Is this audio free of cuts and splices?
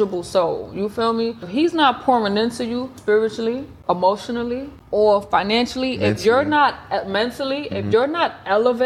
no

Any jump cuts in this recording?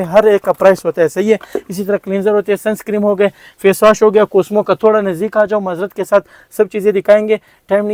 no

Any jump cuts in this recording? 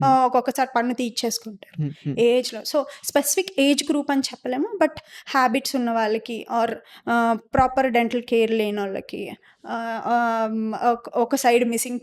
no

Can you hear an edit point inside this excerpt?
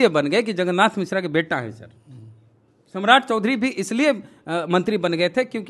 no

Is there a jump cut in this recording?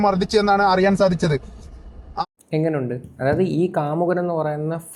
no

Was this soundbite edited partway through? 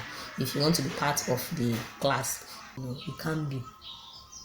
yes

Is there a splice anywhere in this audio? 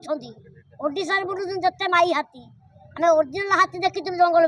no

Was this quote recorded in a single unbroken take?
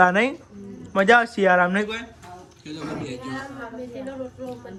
yes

